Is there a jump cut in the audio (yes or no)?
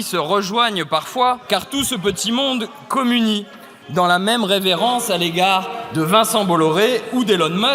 yes